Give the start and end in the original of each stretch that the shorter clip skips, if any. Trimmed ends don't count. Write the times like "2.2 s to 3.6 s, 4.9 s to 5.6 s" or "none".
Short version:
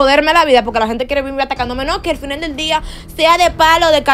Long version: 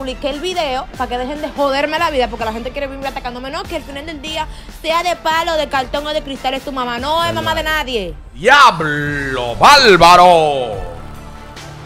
none

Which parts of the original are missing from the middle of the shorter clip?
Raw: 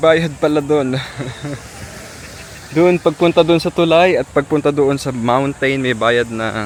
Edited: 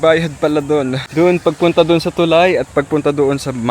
1.0 s to 2.6 s

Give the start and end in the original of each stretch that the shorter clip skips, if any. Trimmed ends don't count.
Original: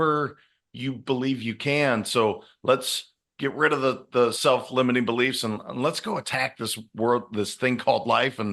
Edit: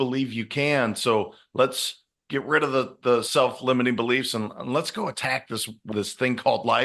6.9 s to 7.3 s

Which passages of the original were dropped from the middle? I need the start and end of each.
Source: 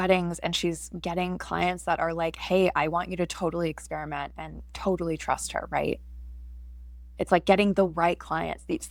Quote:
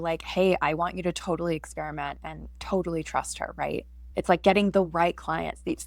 6.1 s to 7.0 s

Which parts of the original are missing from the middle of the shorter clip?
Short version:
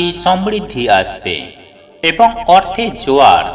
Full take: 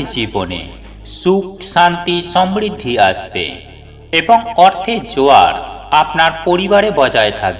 none

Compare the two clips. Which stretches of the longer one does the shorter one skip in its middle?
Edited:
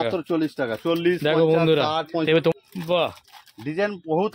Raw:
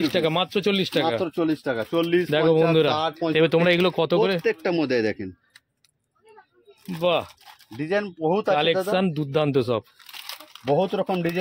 3.6 s to 6.7 s

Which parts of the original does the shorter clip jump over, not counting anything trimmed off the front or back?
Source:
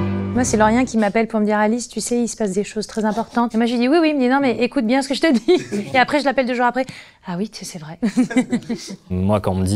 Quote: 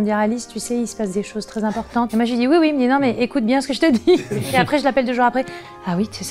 none

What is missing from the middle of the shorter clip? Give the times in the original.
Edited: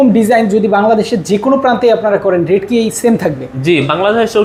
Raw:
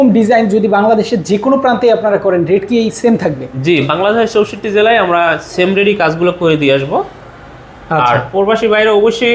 none

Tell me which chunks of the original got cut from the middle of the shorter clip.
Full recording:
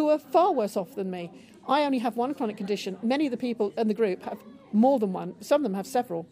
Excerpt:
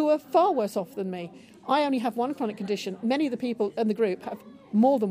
none

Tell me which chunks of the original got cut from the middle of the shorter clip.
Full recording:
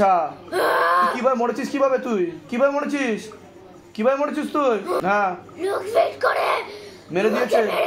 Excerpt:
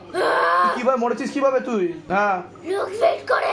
2.5 s to 5.0 s

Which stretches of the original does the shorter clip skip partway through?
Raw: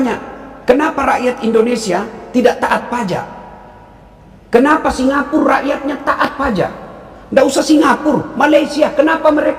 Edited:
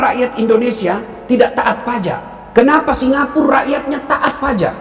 3.4 s to 4.3 s

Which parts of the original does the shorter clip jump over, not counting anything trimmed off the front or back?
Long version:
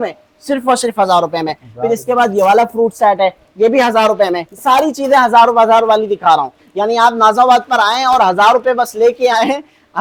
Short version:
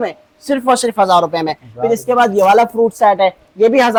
none

